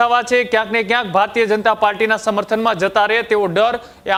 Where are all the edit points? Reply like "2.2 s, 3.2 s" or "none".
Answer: none